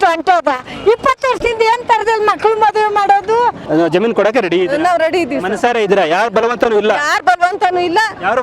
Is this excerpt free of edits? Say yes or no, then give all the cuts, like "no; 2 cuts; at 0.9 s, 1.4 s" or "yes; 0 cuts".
no; 1 cut; at 3.6 s